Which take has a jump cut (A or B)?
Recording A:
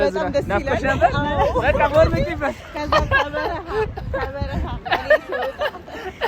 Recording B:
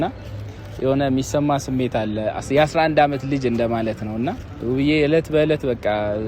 B